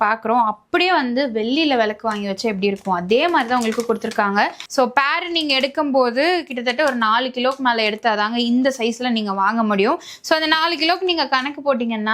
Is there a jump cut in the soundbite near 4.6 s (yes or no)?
yes